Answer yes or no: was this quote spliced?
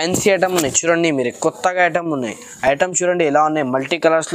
no